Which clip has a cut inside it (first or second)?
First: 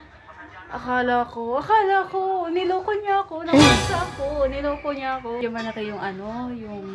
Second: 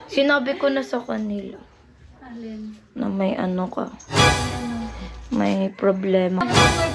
first